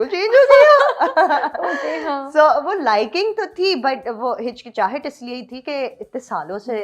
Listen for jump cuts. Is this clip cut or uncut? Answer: uncut